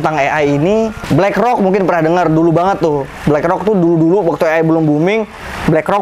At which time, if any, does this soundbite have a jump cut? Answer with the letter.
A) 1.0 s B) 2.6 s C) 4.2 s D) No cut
A